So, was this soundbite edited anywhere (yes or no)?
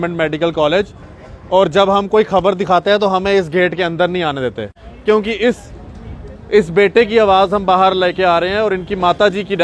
yes